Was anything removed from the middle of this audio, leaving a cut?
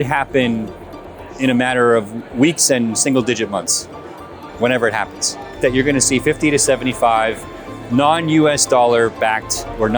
yes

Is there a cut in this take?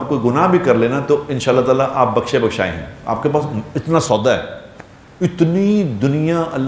no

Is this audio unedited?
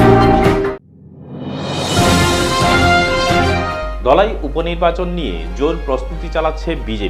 no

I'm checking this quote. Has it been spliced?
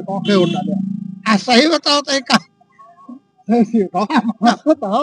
no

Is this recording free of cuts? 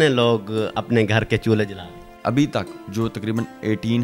yes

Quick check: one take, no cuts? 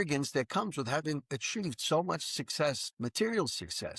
no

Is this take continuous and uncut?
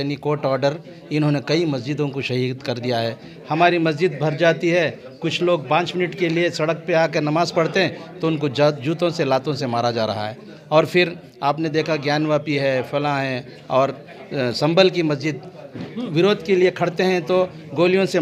yes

